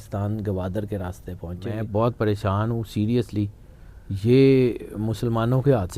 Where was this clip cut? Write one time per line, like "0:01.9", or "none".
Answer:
0:01.7

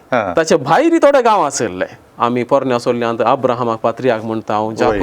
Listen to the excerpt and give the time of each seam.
0:02.0

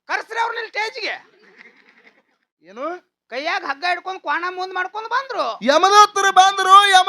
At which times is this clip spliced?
0:02.6

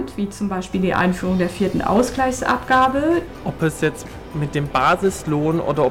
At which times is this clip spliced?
0:03.2

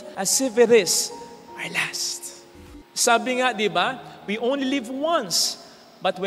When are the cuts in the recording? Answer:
0:02.6

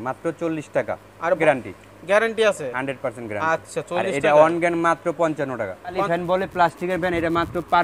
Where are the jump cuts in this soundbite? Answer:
0:01.4
0:06.0

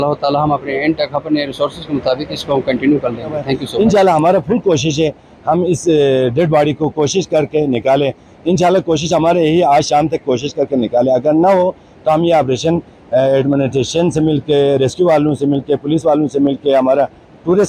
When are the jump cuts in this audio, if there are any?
0:03.7

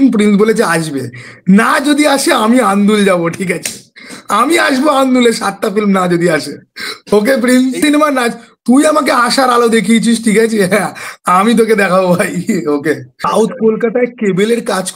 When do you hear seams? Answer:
0:07.8
0:13.2

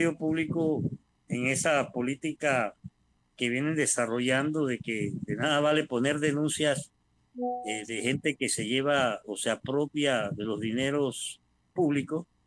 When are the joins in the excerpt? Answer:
none

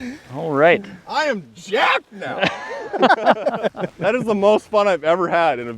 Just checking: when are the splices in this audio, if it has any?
0:01.0
0:03.9

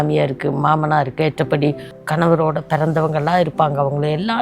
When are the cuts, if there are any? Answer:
0:01.9

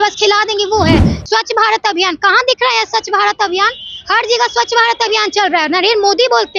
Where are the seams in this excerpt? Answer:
0:01.1

